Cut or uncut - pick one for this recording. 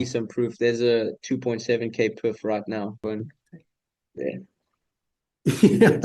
cut